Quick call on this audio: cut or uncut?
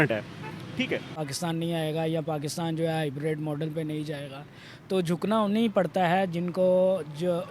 cut